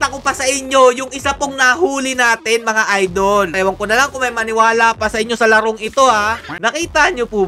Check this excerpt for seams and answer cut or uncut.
cut